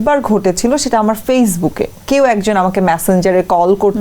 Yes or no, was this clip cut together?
yes